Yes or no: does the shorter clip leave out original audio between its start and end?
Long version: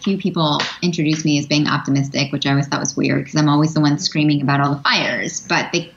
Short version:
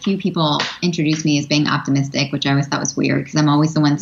no